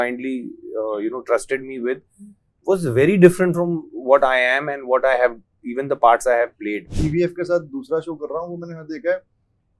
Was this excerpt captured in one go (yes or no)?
no